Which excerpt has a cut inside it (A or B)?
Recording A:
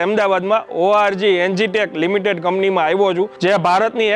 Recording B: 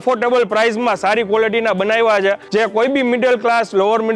B